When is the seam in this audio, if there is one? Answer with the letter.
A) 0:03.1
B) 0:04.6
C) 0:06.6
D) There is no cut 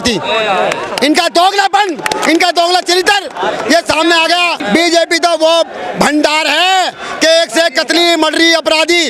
B